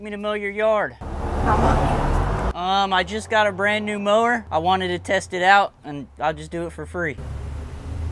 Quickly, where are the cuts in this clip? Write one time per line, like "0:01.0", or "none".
none